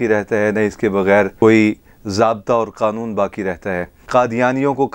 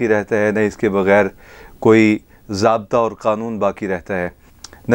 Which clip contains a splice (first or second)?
first